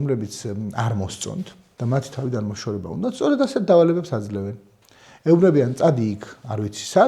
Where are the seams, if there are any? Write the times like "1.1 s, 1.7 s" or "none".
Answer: 1.6 s